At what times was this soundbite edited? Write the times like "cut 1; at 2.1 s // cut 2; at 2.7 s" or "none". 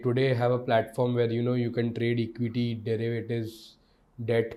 none